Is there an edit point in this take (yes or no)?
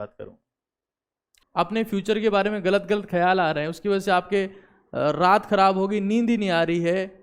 yes